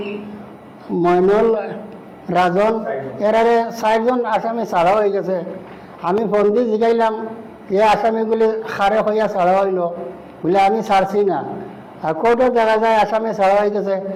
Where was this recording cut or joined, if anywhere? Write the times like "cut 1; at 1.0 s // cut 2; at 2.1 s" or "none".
none